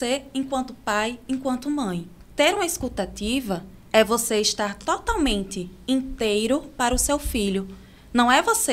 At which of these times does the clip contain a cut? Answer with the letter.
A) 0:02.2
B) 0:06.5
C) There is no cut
A